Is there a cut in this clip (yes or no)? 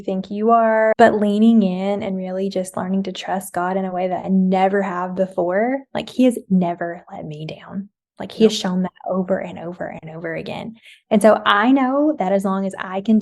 yes